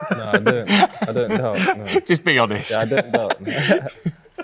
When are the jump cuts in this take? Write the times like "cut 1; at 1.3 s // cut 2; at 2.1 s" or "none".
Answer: none